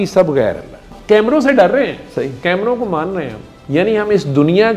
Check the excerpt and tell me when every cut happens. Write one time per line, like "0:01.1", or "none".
0:00.9

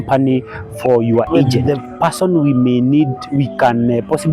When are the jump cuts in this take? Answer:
0:01.6

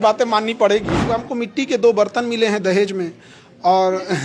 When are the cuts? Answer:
0:01.1

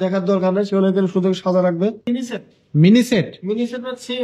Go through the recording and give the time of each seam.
0:02.0

